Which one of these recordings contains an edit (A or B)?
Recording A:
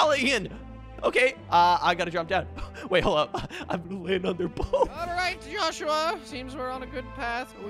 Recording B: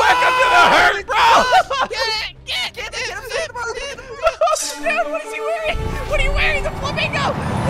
A